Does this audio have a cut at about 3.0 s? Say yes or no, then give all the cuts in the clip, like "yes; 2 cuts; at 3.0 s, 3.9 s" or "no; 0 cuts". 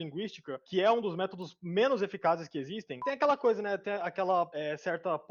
yes; 1 cut; at 3.0 s